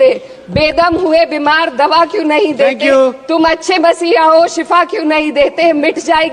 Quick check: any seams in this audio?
no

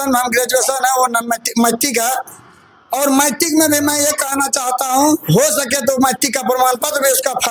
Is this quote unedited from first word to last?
yes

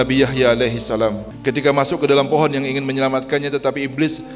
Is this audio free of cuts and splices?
no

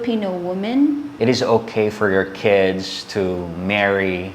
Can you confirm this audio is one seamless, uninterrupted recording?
no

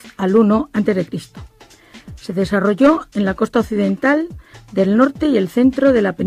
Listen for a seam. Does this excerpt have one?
no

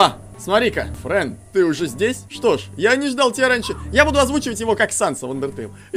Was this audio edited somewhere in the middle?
yes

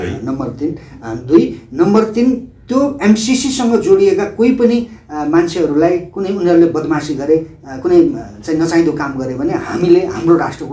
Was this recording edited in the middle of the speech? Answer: no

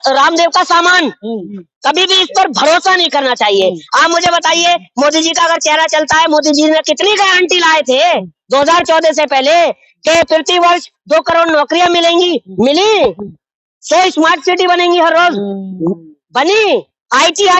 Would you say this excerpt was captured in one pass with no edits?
yes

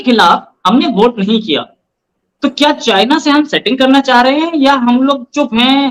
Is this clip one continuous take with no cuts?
yes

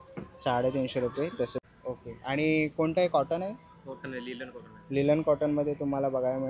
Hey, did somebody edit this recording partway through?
yes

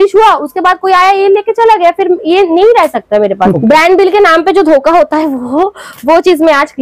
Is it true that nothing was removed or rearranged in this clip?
no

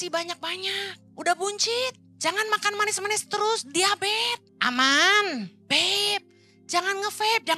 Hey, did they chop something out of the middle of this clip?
yes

